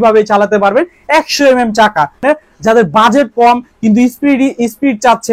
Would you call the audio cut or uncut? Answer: cut